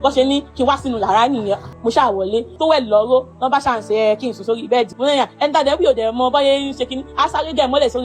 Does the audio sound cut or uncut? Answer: cut